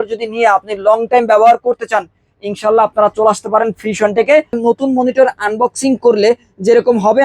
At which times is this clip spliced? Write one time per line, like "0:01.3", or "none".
0:04.6